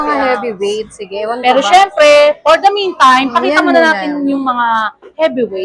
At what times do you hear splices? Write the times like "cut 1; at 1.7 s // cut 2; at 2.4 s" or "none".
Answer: none